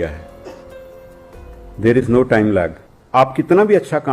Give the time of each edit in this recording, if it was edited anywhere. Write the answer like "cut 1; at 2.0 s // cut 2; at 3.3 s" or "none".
cut 1; at 3.0 s